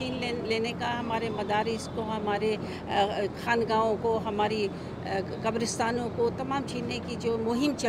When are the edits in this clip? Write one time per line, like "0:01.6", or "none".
none